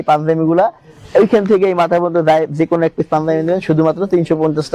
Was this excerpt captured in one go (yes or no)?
yes